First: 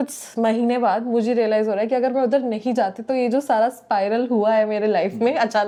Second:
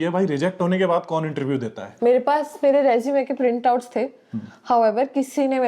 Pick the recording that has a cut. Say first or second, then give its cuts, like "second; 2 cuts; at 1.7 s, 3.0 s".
second; 1 cut; at 1.9 s